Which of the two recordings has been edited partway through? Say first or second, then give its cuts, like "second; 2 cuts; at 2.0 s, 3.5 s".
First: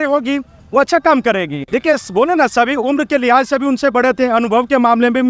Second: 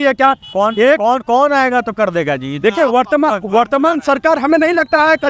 first; 1 cut; at 1.6 s